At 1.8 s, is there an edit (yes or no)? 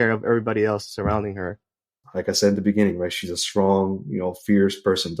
yes